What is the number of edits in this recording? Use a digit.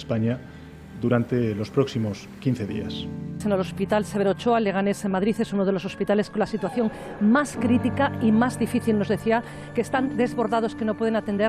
2